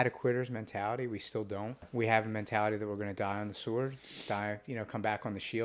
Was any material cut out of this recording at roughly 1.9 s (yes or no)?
yes